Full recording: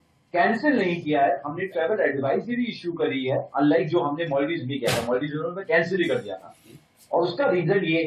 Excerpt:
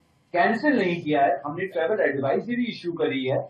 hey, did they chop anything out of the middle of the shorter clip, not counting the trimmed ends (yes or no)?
no